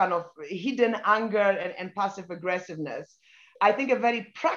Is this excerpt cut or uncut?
uncut